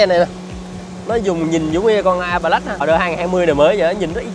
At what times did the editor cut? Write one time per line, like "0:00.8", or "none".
0:02.8